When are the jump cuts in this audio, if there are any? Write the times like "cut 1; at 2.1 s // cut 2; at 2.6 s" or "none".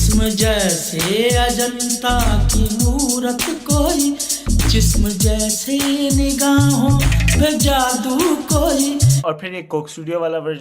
cut 1; at 9.2 s